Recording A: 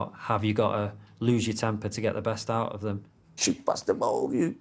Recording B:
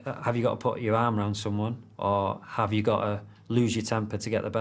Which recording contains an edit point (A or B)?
A